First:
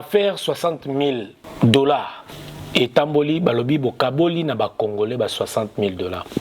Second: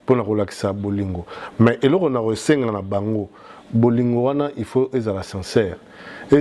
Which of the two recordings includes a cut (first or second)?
first